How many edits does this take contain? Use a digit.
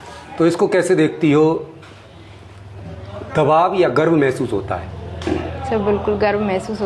0